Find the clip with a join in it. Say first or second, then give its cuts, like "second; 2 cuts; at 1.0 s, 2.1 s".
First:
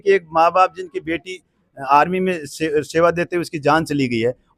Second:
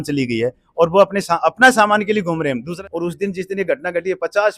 second; 1 cut; at 2.7 s